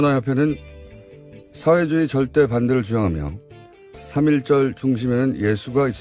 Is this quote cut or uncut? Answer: uncut